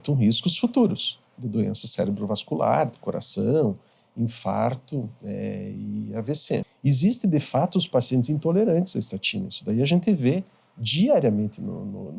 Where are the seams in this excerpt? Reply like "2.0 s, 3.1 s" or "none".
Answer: 6.7 s